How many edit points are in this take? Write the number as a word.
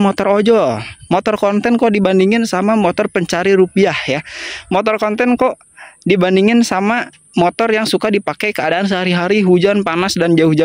zero